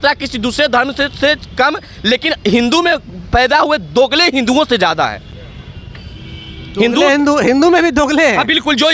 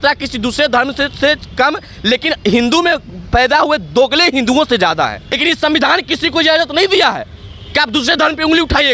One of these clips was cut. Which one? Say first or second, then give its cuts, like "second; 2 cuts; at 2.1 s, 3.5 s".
second; 1 cut; at 5.4 s